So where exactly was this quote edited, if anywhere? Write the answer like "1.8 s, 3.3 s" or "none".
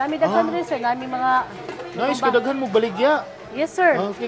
none